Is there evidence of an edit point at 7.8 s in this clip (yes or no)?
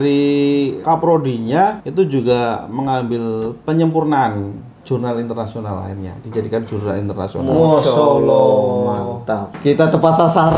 no